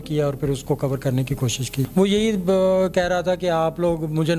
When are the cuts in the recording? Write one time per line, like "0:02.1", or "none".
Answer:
0:01.9